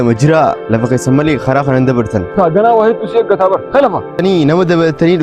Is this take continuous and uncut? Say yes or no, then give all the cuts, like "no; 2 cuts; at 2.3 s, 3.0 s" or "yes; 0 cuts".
no; 2 cuts; at 2.3 s, 4.2 s